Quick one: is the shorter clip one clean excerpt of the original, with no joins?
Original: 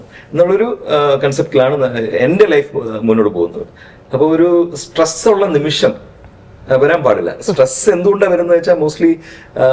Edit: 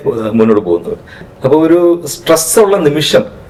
yes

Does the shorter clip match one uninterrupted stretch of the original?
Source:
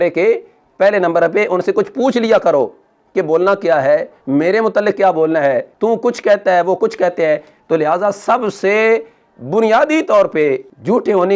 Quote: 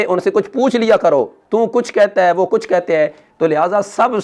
no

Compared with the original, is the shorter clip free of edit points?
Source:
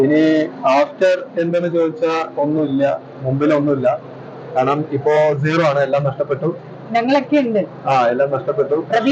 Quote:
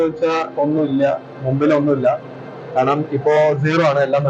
yes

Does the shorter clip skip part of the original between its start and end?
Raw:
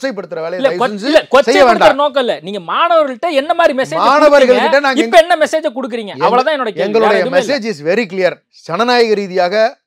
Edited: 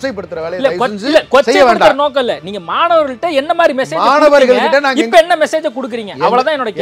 no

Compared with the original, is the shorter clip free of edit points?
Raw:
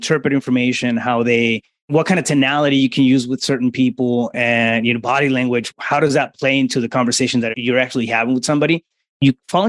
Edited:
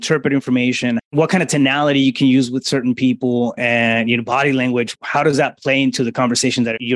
no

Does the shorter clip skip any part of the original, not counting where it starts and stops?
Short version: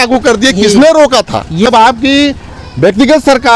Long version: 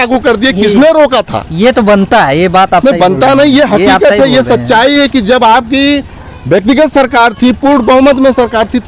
yes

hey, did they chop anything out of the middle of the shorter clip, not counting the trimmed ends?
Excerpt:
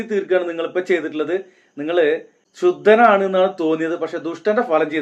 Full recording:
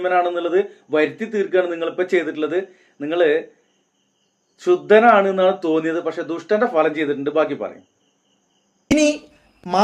yes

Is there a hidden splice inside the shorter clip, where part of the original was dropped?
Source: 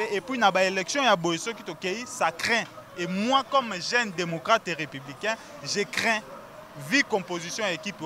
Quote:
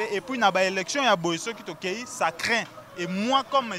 no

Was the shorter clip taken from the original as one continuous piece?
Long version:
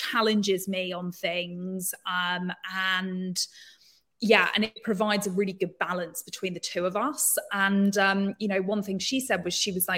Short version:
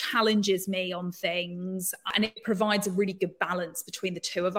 no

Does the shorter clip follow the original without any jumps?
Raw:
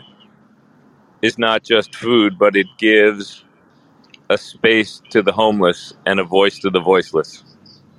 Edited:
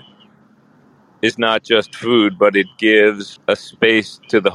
no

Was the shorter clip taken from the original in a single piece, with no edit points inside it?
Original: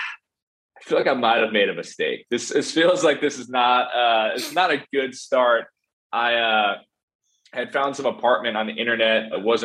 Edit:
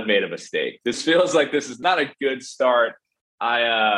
no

